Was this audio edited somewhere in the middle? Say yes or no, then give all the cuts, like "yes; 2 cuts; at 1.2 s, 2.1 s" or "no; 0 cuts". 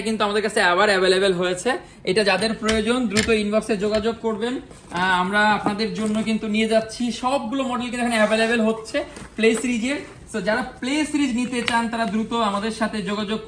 no; 0 cuts